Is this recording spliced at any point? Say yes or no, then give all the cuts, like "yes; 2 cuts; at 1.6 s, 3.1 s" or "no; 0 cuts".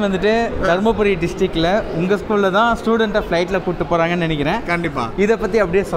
no; 0 cuts